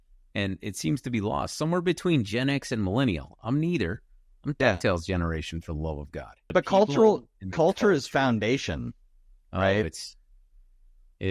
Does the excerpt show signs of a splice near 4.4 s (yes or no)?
no